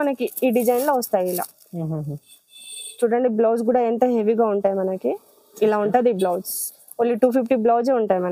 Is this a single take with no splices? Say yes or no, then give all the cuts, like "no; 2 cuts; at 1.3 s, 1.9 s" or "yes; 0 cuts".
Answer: yes; 0 cuts